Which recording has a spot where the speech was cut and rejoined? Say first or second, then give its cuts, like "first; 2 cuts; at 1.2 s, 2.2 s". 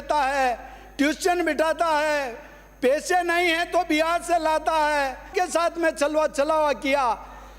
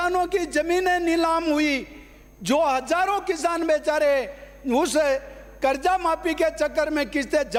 first; 1 cut; at 5.3 s